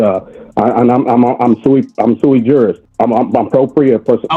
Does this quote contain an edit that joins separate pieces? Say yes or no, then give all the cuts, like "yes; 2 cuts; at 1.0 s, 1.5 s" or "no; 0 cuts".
yes; 1 cut; at 2.8 s